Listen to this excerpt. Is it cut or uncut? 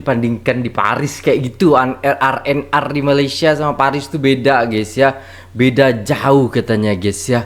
uncut